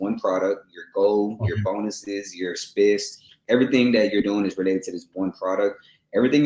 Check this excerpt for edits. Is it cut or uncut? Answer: uncut